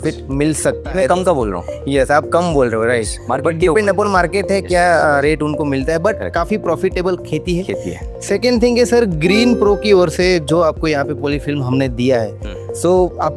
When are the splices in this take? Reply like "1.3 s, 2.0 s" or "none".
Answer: none